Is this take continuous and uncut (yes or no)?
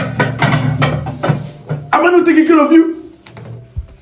yes